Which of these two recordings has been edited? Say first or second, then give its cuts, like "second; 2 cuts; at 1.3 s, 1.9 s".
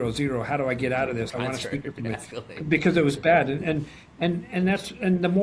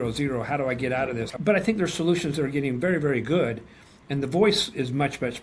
second; 1 cut; at 1.3 s